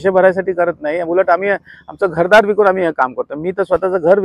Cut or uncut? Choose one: uncut